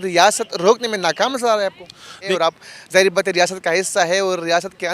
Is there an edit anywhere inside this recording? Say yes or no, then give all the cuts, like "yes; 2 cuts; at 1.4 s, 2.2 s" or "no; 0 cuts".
yes; 1 cut; at 2.3 s